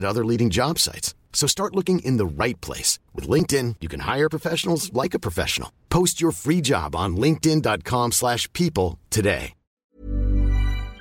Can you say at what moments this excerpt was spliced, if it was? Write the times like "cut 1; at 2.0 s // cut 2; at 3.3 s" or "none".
cut 1; at 9.9 s